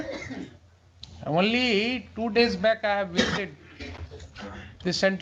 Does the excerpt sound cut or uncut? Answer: uncut